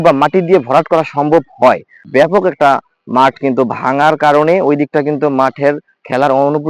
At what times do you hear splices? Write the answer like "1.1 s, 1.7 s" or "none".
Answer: 2.1 s